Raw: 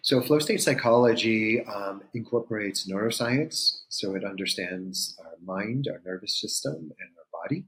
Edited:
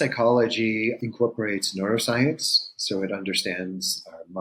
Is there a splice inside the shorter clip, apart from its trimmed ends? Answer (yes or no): yes